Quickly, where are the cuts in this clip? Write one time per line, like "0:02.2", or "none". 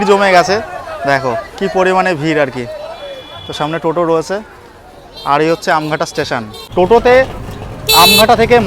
0:06.6